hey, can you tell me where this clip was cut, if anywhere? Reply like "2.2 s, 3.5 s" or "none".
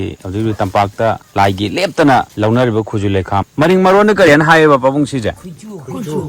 1.2 s, 2.3 s, 3.5 s

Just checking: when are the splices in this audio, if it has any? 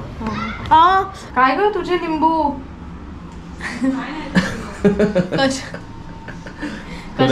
1.2 s

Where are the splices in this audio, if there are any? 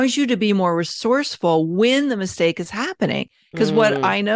none

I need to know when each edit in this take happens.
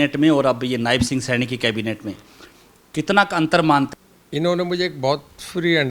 3.9 s

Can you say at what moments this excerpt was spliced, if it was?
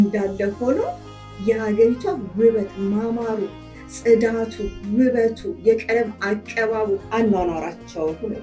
7.1 s

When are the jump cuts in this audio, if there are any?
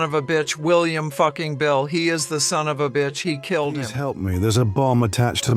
3.7 s

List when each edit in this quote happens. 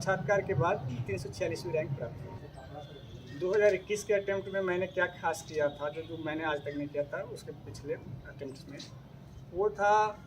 2.4 s

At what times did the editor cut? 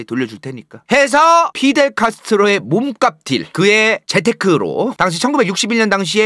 4.9 s

